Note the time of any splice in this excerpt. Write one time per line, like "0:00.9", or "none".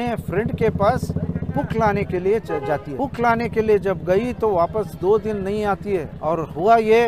0:02.9
0:06.1

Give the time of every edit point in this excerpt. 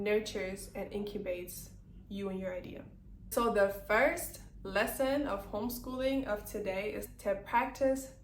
0:03.3
0:07.0

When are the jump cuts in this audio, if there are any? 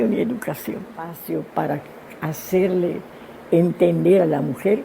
0:01.2

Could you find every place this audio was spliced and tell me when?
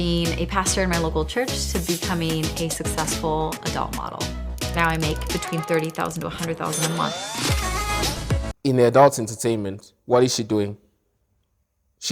0:08.5

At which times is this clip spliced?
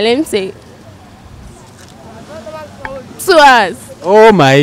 0:03.7

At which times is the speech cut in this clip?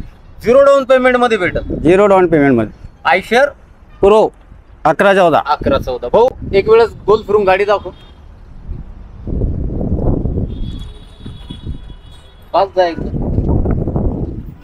none

